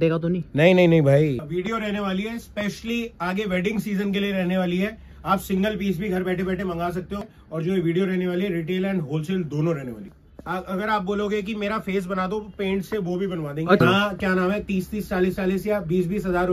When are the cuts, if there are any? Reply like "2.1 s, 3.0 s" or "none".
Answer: 1.5 s, 7.2 s, 10.1 s, 13.8 s